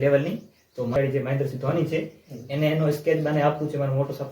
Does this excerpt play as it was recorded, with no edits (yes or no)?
no